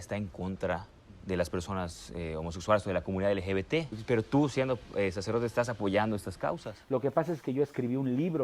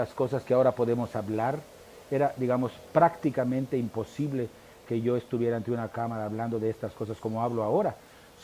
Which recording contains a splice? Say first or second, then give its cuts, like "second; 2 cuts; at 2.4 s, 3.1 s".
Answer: first; 2 cuts; at 3.9 s, 6.7 s